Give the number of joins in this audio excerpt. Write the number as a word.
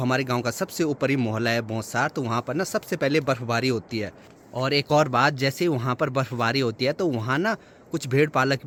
zero